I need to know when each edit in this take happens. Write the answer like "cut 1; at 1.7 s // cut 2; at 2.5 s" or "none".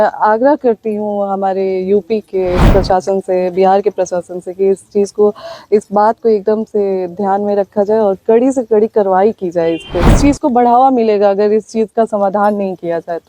cut 1; at 2.6 s // cut 2; at 10.1 s